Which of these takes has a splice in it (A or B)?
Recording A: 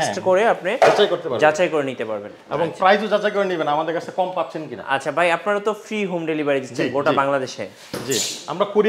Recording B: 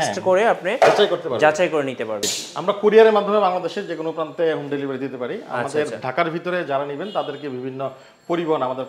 B